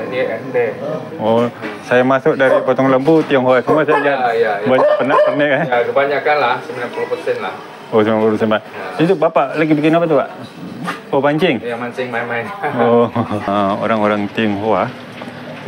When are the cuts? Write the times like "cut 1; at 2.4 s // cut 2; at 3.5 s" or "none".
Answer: cut 1; at 13.5 s